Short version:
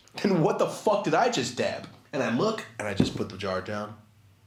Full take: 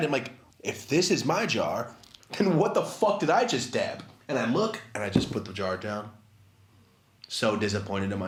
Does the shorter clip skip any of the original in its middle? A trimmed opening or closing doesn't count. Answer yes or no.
no